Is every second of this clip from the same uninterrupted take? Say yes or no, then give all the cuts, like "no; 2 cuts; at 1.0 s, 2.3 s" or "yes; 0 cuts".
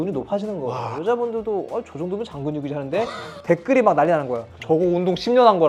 yes; 0 cuts